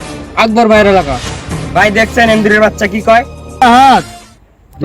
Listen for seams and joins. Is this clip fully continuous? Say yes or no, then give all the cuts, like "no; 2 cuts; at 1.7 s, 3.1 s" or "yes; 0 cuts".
no; 1 cut; at 3.6 s